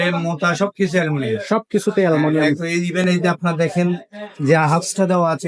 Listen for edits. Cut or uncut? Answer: uncut